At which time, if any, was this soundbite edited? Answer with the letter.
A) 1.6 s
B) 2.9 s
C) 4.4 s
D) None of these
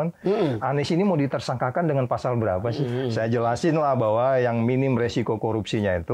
B